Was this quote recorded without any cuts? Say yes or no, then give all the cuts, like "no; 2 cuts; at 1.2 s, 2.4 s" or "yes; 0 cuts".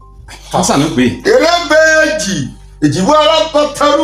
yes; 0 cuts